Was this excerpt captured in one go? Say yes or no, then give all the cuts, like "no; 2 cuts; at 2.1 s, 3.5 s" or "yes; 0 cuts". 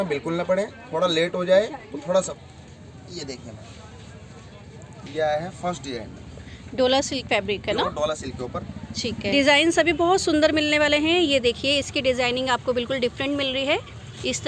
no; 2 cuts; at 2.3 s, 9.3 s